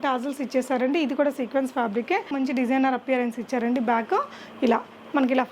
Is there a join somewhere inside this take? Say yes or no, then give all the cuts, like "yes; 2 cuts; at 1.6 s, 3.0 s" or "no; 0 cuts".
yes; 1 cut; at 2.3 s